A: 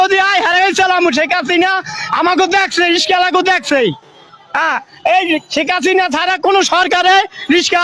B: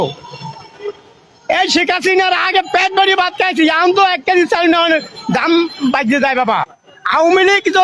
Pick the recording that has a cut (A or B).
B